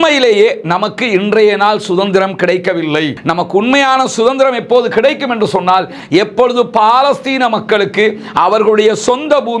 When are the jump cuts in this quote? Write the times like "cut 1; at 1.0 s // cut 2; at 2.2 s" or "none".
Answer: cut 1; at 3.2 s